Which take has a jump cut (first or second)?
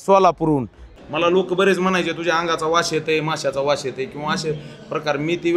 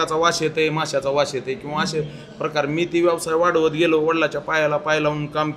first